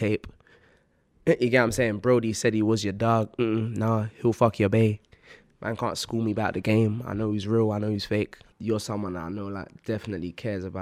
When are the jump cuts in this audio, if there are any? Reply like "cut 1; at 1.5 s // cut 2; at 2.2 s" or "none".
cut 1; at 8.5 s